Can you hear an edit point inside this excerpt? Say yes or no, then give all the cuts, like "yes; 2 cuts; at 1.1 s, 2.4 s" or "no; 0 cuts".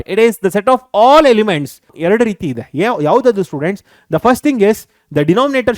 yes; 1 cut; at 1.8 s